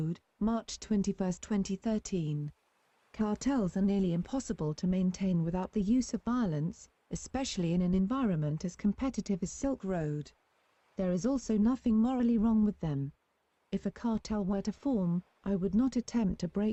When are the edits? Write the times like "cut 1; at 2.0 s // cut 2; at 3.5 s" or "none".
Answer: none